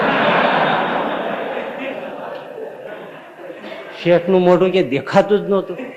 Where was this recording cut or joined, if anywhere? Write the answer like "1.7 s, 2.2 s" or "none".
none